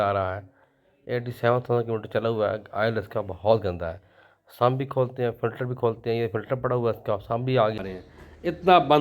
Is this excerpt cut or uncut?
cut